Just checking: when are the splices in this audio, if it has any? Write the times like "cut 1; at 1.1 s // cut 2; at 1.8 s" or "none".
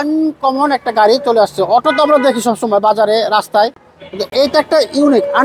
none